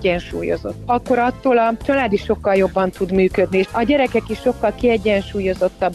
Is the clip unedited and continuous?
no; 1 cut; at 3.7 s

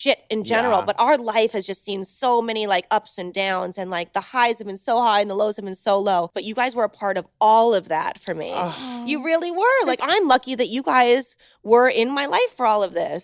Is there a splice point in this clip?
yes; 2 cuts; at 6.4 s, 10.0 s

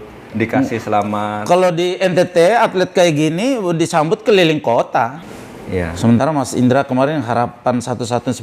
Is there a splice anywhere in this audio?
yes; 1 cut; at 5.3 s

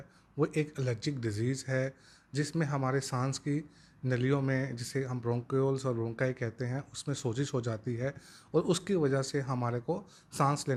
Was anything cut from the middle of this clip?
no; 0 cuts

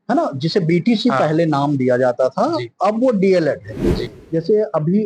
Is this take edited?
yes; 1 cut; at 4.0 s

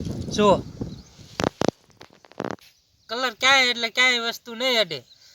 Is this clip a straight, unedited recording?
no; 1 cut; at 3.1 s

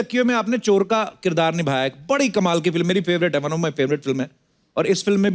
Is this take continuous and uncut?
yes; 0 cuts

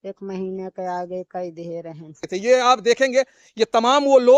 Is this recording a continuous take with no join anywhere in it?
no; 1 cut; at 2.3 s

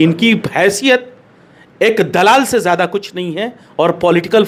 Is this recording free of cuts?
yes; 0 cuts

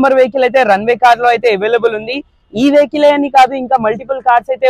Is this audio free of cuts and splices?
yes; 0 cuts

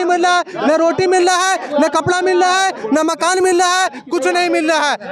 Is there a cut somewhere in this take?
no; 0 cuts

